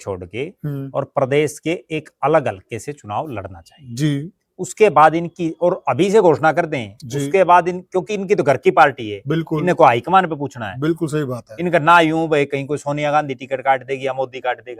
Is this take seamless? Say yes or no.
yes